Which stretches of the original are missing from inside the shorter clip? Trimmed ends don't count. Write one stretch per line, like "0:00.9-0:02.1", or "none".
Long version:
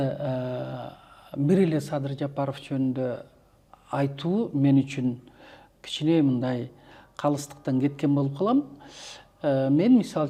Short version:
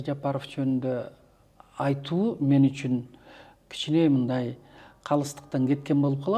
none